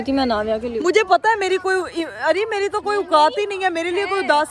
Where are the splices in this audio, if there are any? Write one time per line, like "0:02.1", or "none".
none